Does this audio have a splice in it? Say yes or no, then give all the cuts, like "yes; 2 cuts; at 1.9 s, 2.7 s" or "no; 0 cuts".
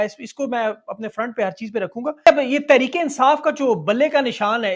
yes; 1 cut; at 2.2 s